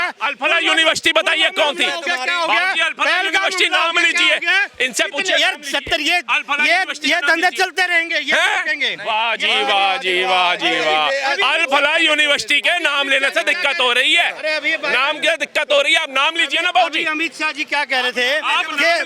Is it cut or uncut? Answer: uncut